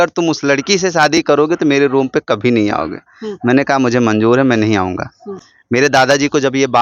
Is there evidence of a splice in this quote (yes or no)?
no